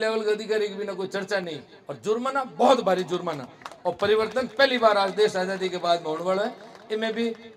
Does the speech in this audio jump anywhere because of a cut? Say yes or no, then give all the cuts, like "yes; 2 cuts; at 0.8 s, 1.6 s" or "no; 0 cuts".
no; 0 cuts